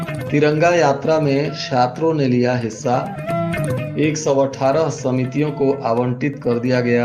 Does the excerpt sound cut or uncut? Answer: uncut